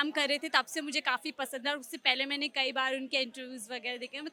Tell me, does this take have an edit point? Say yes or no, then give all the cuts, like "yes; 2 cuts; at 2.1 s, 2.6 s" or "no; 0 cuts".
no; 0 cuts